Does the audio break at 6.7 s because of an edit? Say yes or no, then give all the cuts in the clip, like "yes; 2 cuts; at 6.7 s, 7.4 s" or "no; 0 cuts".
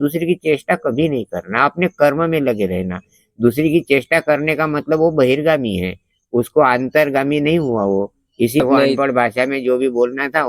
no; 1 cut; at 8.6 s